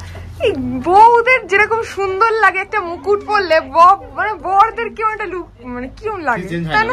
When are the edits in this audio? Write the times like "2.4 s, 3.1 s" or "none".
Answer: none